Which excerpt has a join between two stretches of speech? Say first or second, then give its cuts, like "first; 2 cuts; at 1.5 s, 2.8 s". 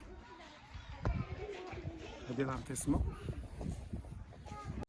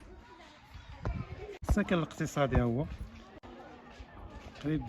second; 1 cut; at 1.6 s